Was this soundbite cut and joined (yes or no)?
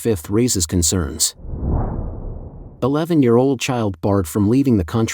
yes